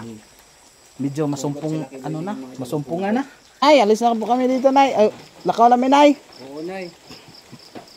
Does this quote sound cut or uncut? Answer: cut